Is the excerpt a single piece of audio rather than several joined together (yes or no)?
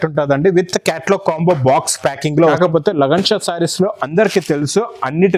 no